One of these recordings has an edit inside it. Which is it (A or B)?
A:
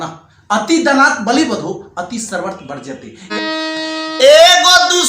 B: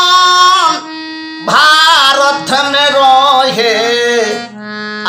A